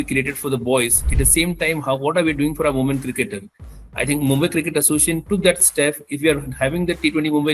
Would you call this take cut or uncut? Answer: uncut